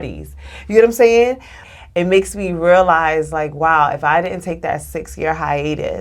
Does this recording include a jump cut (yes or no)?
yes